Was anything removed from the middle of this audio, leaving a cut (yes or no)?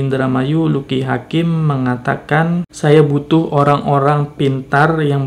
yes